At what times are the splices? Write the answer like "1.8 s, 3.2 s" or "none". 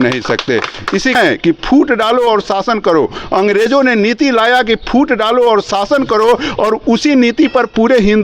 1.2 s